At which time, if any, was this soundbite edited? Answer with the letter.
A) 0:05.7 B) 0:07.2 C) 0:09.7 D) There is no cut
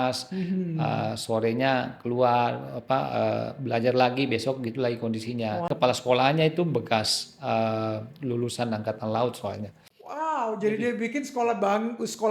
A